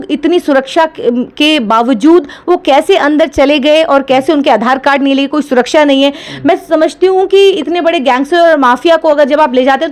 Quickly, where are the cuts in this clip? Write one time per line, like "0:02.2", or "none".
none